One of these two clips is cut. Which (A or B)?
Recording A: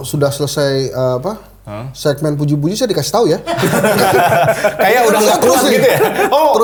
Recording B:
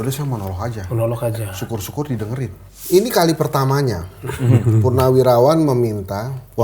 B